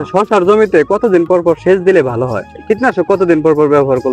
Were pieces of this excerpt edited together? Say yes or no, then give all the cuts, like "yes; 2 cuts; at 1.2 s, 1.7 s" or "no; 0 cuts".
yes; 1 cut; at 2.5 s